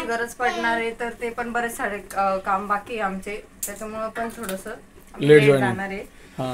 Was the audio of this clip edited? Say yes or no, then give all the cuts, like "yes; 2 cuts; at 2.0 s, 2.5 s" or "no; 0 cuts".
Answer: no; 0 cuts